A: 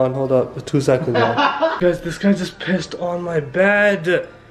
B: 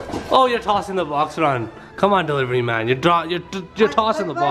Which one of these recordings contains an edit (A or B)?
A